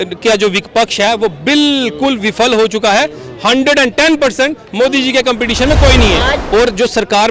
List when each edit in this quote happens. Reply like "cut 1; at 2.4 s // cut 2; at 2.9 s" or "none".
cut 1; at 6.4 s